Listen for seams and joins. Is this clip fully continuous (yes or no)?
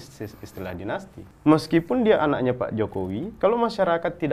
no